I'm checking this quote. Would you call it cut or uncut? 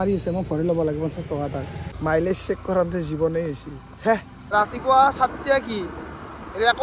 cut